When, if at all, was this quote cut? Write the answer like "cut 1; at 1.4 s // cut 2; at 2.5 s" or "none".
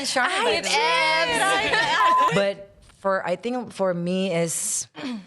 cut 1; at 2.2 s